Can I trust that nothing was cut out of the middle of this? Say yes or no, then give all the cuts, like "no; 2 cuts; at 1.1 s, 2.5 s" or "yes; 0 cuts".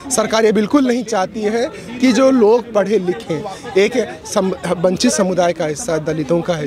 yes; 0 cuts